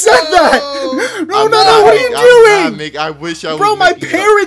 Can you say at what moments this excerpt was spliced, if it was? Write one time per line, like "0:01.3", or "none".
0:03.5